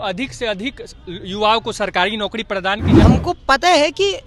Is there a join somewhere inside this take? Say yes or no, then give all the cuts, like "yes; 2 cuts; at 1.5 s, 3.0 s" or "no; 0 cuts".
yes; 1 cut; at 3.0 s